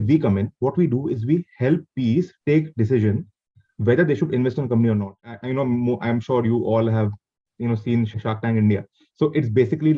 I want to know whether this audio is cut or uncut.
cut